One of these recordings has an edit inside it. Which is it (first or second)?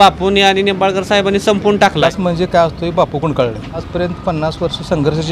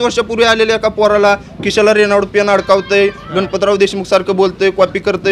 first